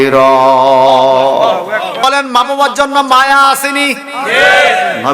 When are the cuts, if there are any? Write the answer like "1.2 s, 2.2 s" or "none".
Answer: 1.9 s